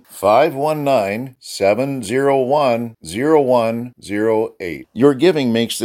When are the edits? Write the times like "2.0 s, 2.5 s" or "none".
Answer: none